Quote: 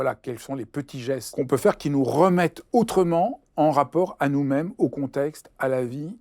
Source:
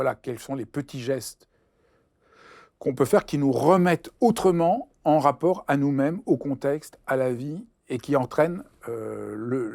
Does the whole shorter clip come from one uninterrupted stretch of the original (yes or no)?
no